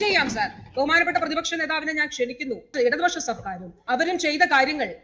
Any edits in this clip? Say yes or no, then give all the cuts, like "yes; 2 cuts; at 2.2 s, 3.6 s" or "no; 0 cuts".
yes; 2 cuts; at 2.7 s, 3.8 s